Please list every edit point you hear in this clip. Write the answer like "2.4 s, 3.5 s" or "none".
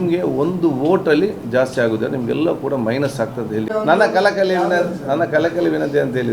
none